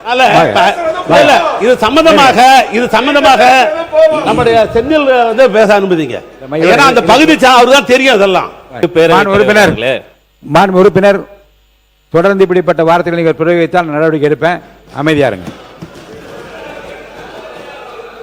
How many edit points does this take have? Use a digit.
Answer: 1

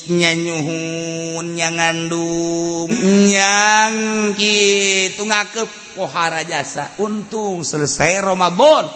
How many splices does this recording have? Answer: 1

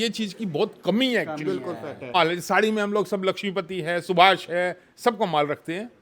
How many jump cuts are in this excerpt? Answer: 1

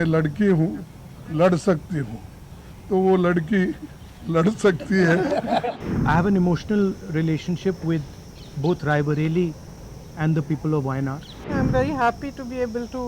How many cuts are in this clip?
2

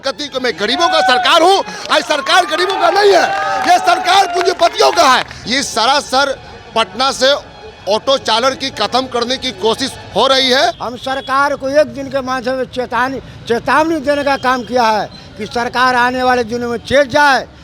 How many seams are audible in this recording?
2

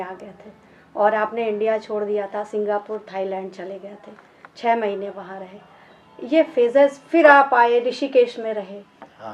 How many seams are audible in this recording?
0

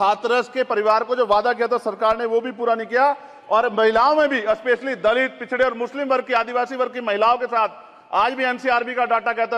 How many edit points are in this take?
0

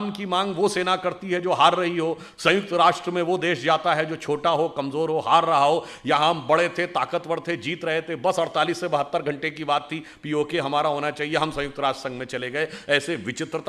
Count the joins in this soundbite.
0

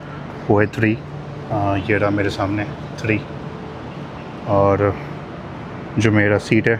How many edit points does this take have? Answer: 0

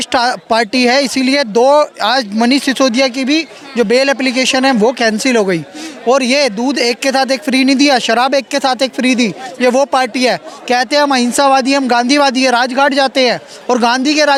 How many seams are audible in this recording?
0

